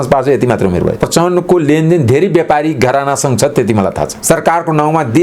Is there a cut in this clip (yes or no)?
yes